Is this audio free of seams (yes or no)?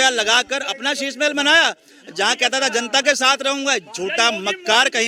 yes